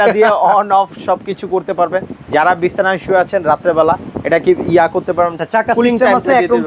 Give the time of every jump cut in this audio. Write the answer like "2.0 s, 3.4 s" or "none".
5.4 s